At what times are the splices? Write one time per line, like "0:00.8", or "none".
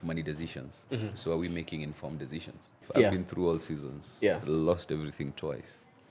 0:02.8